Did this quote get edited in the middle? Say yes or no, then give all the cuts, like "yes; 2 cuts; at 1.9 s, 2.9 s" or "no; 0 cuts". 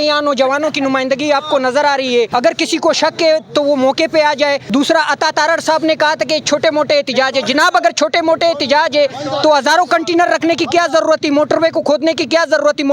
yes; 2 cuts; at 2.3 s, 4.6 s